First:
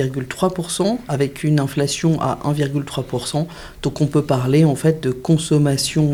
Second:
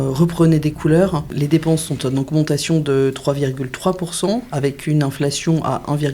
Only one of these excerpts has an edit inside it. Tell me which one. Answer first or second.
second